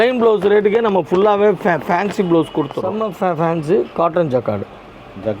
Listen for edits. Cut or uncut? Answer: cut